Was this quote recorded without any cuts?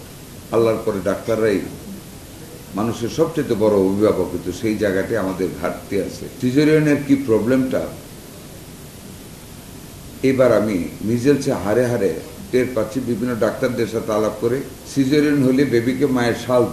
no; 2 cuts; at 6.3 s, 14.8 s

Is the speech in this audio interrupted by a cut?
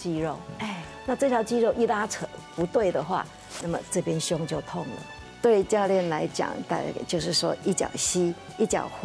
yes; 1 cut; at 5.1 s

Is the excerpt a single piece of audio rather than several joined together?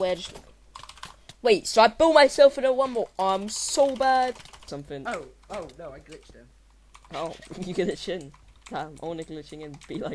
no; 1 cut; at 4.7 s

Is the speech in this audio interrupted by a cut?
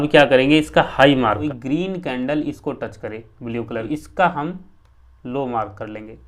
yes; 2 cuts; at 1.4 s, 3.9 s

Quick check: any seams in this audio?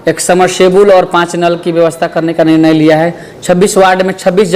no; 0 cuts

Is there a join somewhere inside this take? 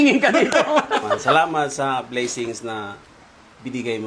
yes; 1 cut; at 1.2 s

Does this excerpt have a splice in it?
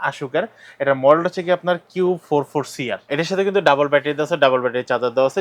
yes; 1 cut; at 3.1 s

